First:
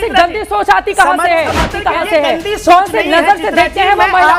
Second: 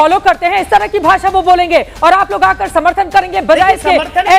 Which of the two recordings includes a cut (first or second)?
first